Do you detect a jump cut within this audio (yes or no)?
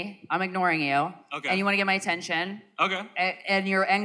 no